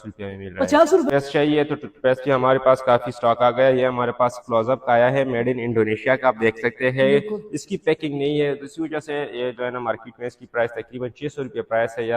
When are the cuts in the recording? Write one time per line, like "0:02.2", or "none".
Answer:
0:01.1